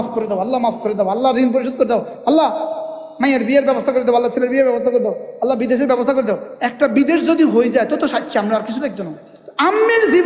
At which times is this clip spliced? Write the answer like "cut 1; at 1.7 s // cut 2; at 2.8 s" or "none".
none